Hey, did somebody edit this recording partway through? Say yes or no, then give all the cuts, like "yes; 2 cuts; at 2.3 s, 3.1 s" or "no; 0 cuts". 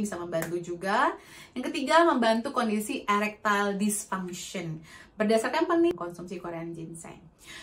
yes; 1 cut; at 5.9 s